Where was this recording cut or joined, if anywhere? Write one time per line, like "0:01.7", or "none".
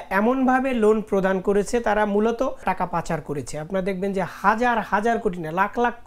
0:02.6